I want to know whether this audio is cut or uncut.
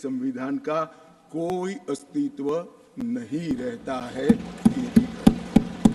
uncut